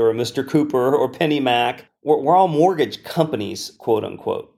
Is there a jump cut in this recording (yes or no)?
yes